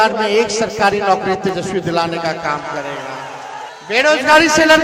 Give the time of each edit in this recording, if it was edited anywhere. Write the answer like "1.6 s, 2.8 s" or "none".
3.7 s